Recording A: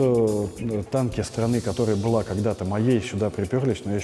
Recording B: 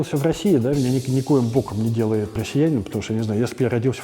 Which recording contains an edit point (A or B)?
B